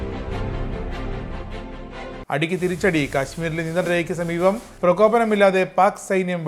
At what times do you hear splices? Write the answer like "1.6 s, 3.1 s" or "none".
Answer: 2.2 s